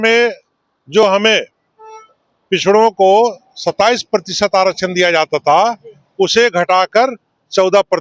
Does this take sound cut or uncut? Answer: uncut